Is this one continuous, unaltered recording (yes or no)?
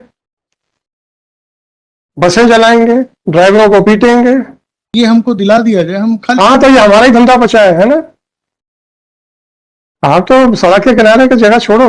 no